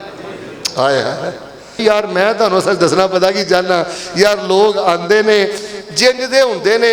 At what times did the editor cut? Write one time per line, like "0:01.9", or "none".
0:01.8